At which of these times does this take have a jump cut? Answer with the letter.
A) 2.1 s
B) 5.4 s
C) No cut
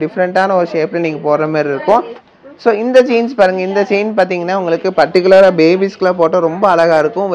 A